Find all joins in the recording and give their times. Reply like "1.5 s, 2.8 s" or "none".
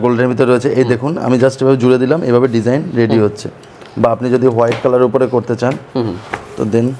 none